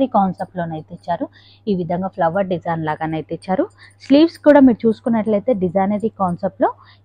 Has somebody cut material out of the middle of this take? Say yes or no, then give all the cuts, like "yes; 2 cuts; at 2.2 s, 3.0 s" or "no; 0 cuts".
no; 0 cuts